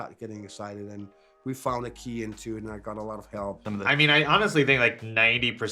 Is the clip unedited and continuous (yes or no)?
no